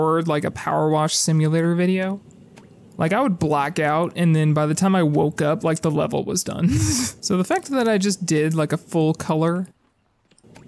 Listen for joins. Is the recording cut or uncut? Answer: uncut